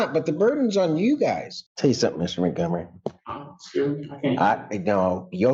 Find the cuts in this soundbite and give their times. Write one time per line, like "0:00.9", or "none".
0:01.5

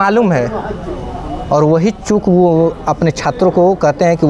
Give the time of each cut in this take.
none

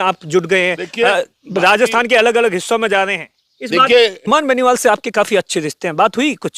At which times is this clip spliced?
0:04.2

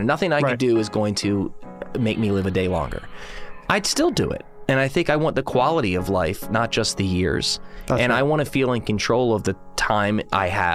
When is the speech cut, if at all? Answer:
none

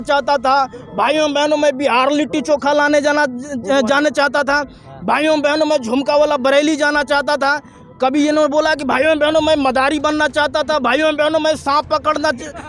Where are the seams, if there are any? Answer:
none

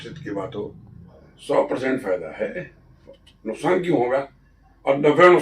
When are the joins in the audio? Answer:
0:01.1

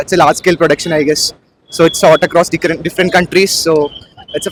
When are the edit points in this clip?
none

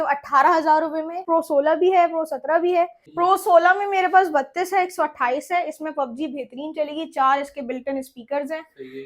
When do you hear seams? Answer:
0:01.2
0:03.0

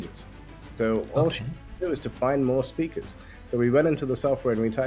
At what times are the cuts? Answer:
none

